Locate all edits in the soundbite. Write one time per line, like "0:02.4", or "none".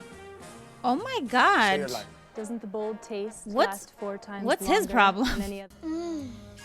0:05.6